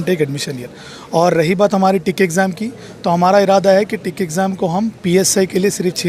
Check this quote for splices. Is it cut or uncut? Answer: uncut